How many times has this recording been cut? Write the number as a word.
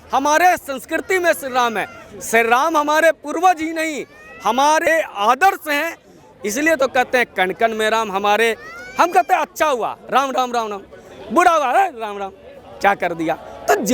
one